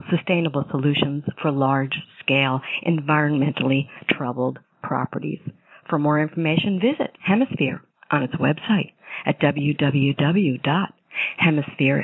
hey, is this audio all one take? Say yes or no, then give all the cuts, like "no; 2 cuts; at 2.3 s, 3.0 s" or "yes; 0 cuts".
yes; 0 cuts